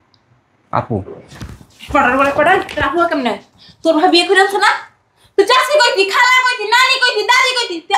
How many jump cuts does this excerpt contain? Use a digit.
0